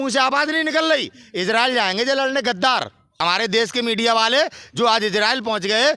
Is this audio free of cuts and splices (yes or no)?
no